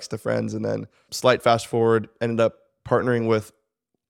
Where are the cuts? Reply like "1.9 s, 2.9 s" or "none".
1.1 s